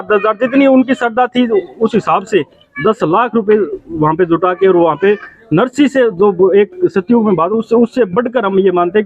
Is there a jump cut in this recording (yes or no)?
no